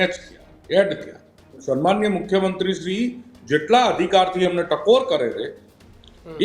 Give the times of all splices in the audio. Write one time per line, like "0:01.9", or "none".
0:01.5